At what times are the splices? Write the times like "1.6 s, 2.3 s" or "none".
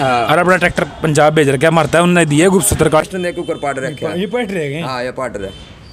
3.0 s